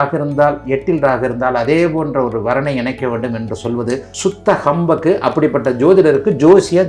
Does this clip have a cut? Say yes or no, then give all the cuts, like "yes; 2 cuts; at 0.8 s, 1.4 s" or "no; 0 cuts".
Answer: no; 0 cuts